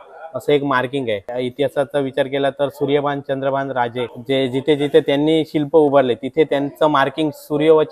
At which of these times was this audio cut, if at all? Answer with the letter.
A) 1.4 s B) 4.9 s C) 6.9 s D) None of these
A